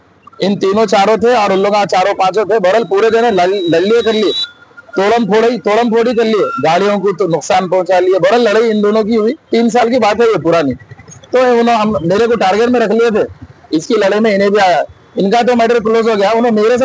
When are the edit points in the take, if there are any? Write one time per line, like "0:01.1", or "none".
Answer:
0:09.5